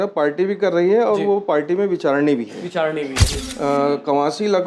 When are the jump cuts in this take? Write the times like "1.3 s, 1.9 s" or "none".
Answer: 3.2 s